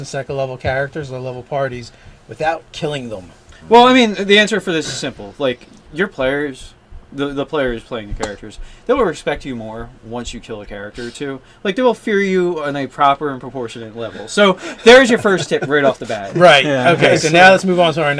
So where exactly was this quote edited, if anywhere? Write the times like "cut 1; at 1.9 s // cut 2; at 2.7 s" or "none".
cut 1; at 5.8 s